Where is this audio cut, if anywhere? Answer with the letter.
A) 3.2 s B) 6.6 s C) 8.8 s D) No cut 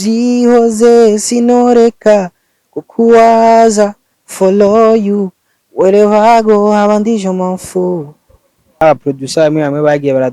C